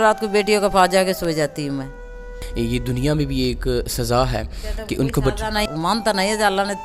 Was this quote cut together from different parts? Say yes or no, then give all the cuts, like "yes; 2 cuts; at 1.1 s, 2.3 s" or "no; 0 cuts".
yes; 2 cuts; at 2.3 s, 5.7 s